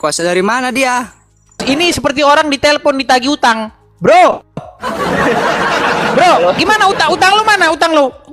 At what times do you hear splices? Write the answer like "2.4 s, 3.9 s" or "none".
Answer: 1.6 s